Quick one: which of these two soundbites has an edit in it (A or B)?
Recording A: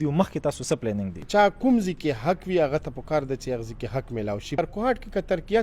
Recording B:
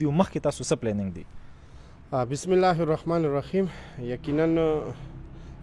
A